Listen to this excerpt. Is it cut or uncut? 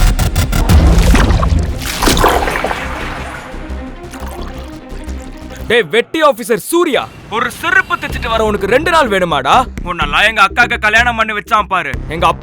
cut